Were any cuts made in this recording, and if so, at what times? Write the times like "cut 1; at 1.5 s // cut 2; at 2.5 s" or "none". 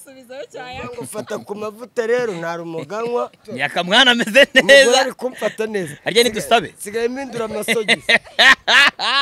cut 1; at 3.4 s